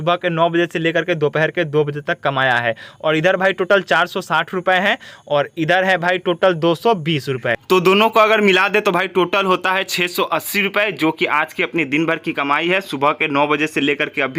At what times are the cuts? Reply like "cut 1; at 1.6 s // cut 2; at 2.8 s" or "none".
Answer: none